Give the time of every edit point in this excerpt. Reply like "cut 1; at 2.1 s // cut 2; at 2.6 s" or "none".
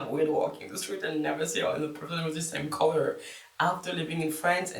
none